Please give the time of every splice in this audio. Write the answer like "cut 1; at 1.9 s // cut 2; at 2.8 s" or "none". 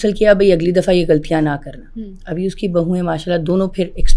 none